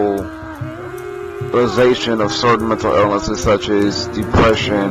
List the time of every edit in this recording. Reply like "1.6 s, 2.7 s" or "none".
3.5 s